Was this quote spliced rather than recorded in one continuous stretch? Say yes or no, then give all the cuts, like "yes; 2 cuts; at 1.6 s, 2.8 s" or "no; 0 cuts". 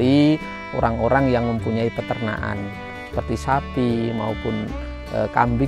no; 0 cuts